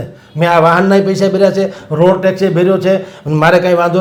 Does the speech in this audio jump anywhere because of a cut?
no; 0 cuts

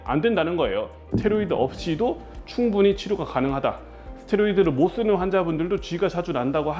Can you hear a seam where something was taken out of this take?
yes; 1 cut; at 1.0 s

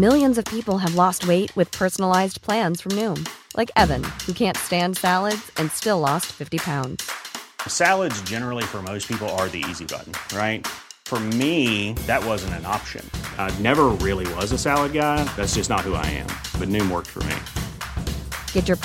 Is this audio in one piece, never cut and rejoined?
yes; 0 cuts

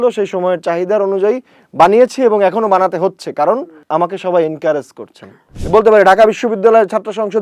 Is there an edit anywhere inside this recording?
yes; 2 cuts; at 3.8 s, 5.5 s

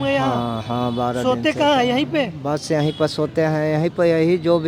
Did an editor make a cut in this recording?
no; 0 cuts

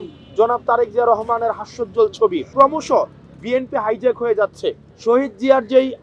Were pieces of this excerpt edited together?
yes; 2 cuts; at 2.5 s, 4.9 s

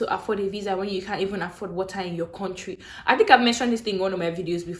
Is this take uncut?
yes; 0 cuts

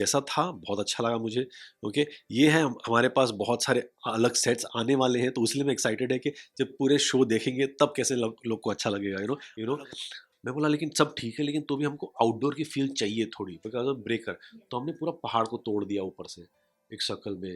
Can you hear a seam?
yes; 1 cut; at 9.5 s

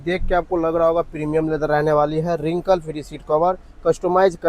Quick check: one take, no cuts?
yes; 0 cuts

